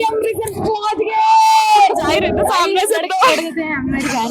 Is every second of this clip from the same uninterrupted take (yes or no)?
no